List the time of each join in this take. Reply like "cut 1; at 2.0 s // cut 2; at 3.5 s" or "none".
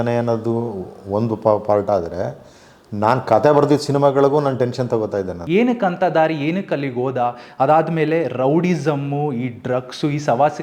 cut 1; at 5.4 s